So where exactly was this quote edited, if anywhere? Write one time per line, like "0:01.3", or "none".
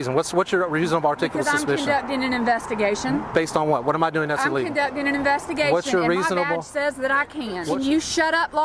0:07.6